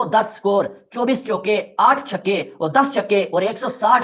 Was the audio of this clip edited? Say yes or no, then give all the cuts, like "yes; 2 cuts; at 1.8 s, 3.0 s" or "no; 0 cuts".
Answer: no; 0 cuts